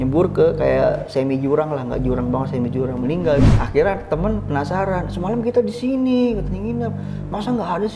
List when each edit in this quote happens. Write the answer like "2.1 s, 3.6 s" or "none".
3.4 s